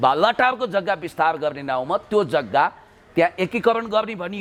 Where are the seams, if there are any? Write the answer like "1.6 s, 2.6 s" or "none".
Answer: none